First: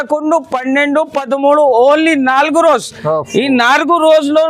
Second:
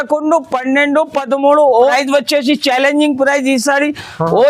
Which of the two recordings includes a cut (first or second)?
second